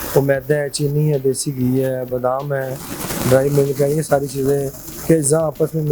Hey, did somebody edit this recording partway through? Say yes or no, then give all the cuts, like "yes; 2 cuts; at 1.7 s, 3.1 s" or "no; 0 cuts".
no; 0 cuts